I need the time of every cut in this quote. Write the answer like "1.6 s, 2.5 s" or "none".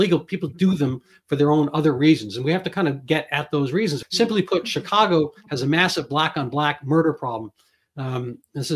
4.0 s